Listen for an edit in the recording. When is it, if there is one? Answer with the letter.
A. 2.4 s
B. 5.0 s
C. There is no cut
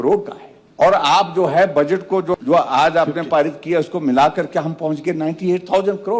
A